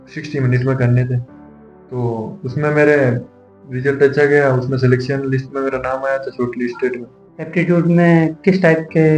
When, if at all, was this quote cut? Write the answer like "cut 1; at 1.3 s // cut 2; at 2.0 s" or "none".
none